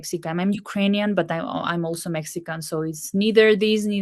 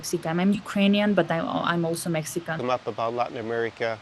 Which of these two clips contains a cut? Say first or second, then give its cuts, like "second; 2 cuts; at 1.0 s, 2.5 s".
second; 1 cut; at 2.6 s